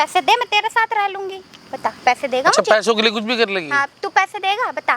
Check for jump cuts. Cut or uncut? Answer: uncut